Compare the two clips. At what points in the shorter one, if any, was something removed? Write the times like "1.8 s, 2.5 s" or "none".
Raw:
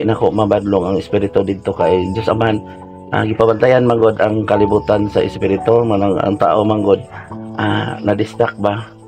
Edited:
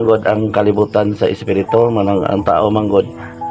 none

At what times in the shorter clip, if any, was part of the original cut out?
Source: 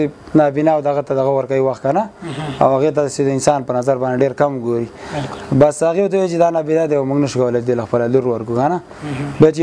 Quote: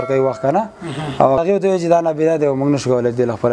1.2 s

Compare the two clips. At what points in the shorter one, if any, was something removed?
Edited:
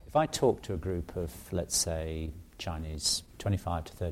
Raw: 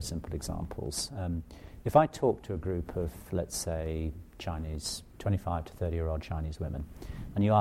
none

